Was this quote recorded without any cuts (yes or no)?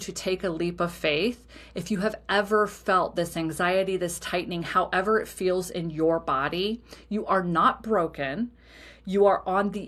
yes